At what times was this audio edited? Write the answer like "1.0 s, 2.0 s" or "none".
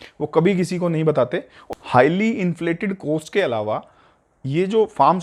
1.5 s

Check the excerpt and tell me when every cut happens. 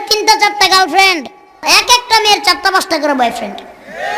1.6 s

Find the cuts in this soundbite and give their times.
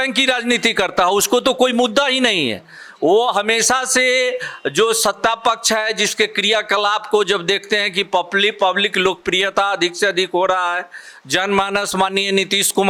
none

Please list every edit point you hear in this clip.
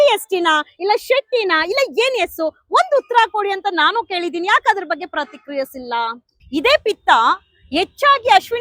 6.3 s

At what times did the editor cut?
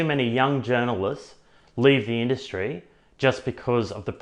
none

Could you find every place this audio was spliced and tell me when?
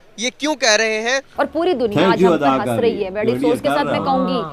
1.2 s

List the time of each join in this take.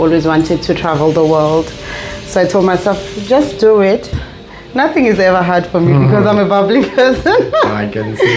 4.1 s

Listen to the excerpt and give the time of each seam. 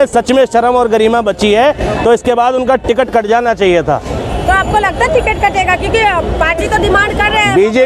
none

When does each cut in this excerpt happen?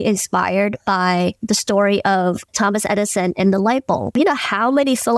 1.4 s, 2.5 s, 4.1 s

